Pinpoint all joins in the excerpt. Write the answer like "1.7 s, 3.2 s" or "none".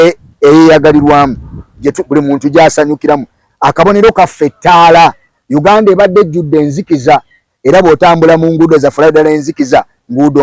3.4 s